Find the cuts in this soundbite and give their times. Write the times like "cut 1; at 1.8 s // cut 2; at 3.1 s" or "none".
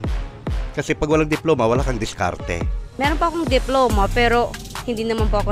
cut 1; at 3.0 s